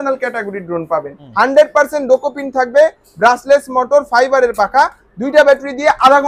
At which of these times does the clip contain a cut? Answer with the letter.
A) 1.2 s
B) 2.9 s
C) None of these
A